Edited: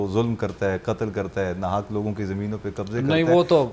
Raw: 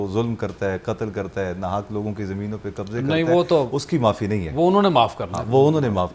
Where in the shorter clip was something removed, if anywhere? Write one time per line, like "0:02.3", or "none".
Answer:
none